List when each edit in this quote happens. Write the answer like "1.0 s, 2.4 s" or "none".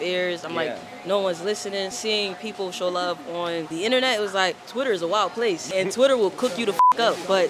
1.9 s, 3.7 s, 4.6 s, 5.7 s